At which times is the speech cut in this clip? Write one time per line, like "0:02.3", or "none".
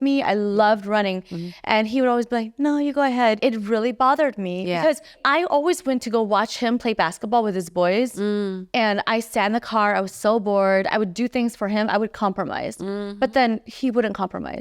0:03.4
0:05.2